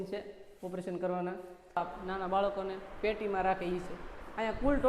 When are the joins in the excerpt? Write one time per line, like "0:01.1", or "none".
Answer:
0:01.8